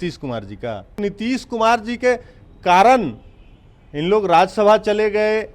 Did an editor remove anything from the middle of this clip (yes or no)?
yes